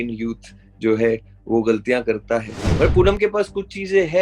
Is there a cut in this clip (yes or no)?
yes